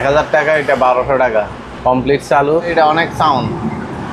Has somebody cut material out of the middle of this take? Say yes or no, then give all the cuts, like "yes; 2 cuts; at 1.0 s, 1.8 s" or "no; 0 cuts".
yes; 2 cuts; at 1.7 s, 2.7 s